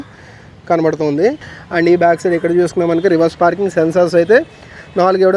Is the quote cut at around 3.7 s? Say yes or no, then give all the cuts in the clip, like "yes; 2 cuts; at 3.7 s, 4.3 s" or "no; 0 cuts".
no; 1 cut; at 1.5 s